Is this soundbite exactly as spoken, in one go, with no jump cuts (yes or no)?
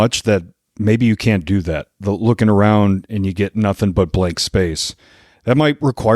yes